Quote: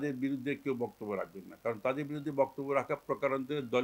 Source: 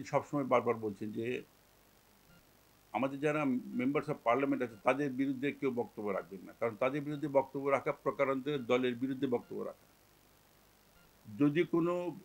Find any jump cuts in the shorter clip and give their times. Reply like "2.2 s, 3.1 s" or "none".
none